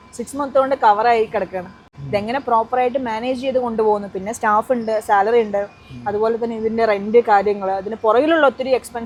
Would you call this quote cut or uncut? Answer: uncut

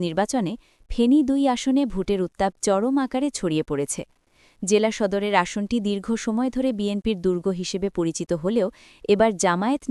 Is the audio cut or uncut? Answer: uncut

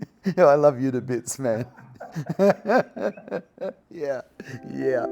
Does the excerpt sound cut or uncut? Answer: cut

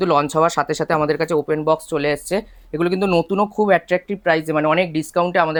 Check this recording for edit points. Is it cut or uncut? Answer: uncut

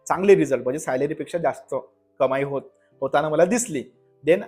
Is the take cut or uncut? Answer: uncut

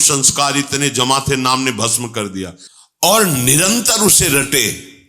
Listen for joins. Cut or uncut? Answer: cut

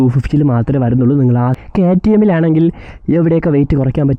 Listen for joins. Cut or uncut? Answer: cut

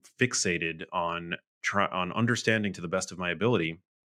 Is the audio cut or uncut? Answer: uncut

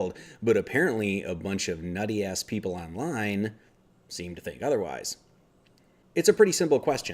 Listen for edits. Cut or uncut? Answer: cut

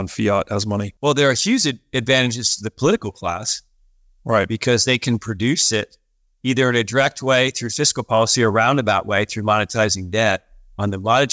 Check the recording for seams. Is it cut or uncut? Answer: cut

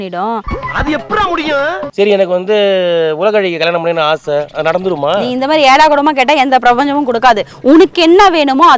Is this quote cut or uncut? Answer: cut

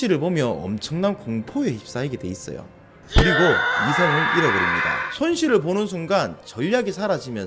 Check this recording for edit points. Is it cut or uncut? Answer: uncut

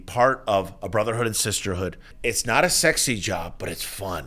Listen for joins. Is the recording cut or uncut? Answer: cut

